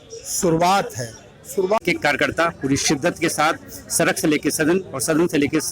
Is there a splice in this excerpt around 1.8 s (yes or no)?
yes